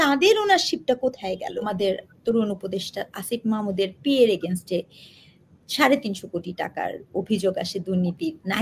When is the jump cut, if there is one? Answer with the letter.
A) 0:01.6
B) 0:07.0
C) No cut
A